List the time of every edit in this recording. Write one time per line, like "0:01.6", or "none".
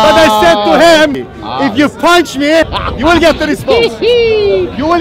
0:01.2
0:02.8